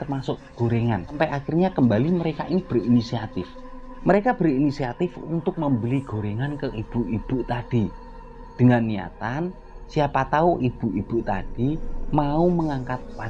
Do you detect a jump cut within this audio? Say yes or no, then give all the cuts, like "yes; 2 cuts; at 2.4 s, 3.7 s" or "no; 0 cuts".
no; 0 cuts